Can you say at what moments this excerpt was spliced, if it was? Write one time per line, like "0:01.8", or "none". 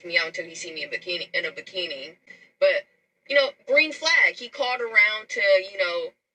none